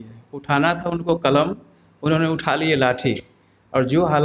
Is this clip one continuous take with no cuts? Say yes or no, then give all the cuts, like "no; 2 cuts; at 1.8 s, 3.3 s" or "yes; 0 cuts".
yes; 0 cuts